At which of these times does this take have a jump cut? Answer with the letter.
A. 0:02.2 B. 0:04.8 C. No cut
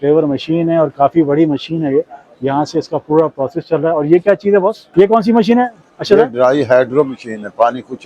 B